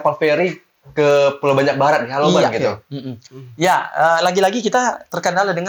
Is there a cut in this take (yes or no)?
no